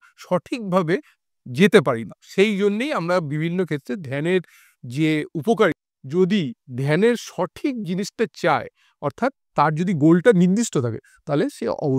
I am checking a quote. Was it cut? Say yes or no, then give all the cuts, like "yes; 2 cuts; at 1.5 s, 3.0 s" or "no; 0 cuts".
yes; 1 cut; at 5.8 s